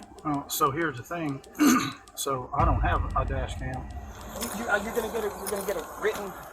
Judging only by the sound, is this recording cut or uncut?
cut